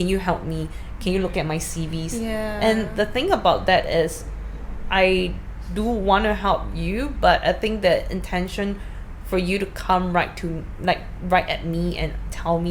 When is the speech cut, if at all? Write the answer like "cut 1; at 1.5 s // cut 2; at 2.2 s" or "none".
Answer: none